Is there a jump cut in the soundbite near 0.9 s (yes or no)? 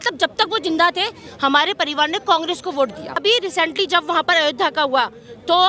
no